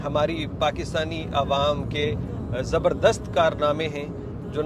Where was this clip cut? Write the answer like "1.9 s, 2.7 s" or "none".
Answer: none